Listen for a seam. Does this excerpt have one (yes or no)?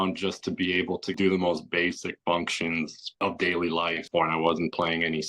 yes